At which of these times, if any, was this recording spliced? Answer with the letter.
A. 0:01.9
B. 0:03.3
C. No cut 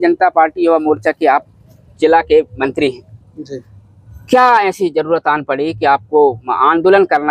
C